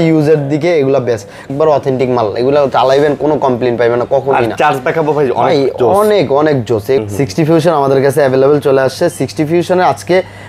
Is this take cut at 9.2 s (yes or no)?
no